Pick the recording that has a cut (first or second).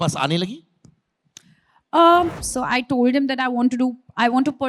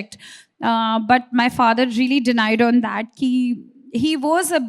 first